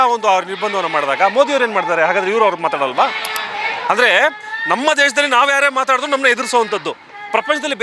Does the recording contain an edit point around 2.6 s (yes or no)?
no